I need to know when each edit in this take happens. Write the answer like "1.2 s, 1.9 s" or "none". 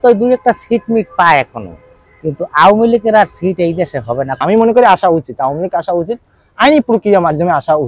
4.3 s